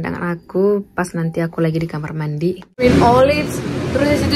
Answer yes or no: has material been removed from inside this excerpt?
yes